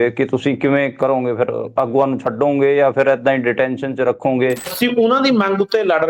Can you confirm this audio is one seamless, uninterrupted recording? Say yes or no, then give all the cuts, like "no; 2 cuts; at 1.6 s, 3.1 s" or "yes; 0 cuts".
no; 1 cut; at 4.7 s